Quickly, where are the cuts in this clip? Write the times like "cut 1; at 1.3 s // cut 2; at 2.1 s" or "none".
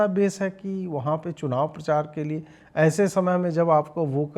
none